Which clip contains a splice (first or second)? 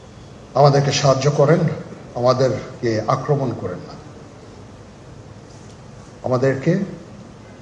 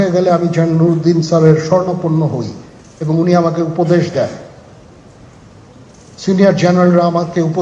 first